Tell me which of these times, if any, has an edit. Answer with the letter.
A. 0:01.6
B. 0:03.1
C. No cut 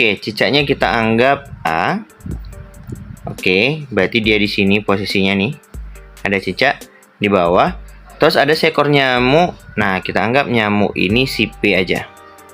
A